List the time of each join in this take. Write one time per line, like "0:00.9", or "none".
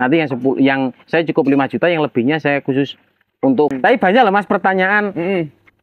0:03.8